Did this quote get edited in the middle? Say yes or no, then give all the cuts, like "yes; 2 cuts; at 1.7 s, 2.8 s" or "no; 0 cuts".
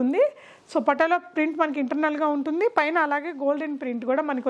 no; 0 cuts